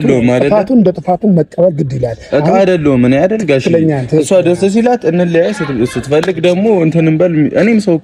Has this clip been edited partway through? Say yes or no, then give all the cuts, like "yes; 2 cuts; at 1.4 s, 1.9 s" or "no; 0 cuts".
no; 0 cuts